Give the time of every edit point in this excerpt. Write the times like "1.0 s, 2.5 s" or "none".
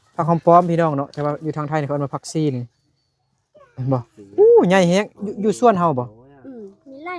none